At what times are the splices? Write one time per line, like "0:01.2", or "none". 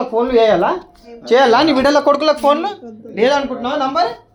none